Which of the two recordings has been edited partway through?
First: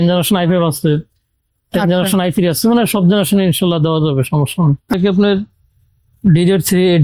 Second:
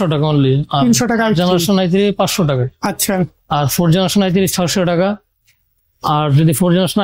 first; 1 cut; at 4.9 s

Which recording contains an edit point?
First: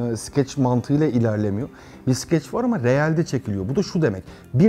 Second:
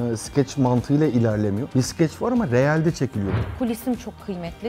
second; 2 cuts; at 1.6 s, 3.3 s

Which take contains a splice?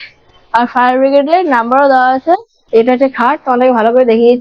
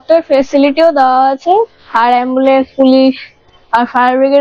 first; 1 cut; at 2.5 s

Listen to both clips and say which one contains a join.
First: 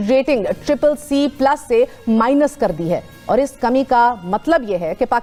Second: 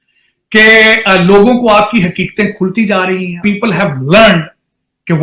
second; 1 cut; at 3.4 s

